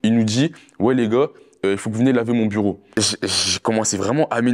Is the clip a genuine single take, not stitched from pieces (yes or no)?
yes